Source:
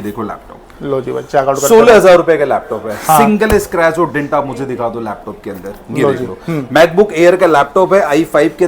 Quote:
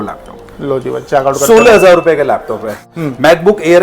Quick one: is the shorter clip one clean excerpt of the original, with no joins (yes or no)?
no